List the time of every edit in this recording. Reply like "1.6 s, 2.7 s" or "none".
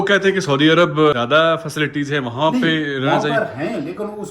1.1 s